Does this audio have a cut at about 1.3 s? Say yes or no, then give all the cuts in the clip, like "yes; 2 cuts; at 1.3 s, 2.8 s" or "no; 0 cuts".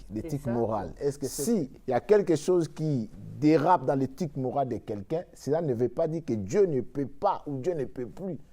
yes; 1 cut; at 1.3 s